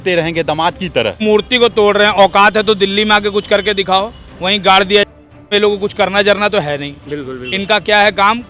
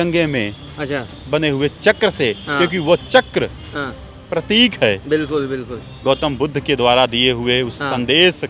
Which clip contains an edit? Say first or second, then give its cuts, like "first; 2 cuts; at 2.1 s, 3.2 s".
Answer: first; 2 cuts; at 1.2 s, 5.0 s